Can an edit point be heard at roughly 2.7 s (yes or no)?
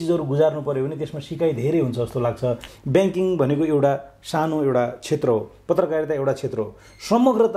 yes